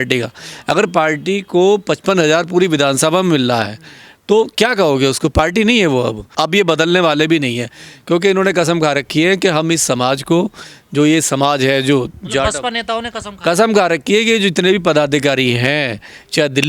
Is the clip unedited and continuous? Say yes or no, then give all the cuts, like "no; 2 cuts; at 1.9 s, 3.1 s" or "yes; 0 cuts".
no; 1 cut; at 6.3 s